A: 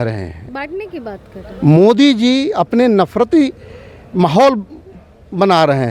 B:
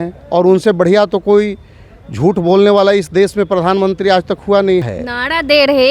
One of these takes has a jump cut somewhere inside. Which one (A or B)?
B